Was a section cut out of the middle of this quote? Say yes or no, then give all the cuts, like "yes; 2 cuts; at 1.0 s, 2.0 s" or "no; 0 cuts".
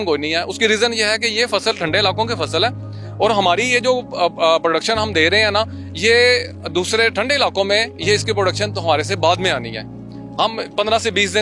no; 0 cuts